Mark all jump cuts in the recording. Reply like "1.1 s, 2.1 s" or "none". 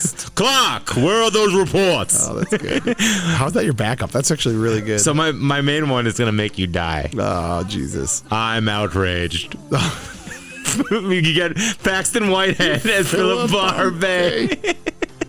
none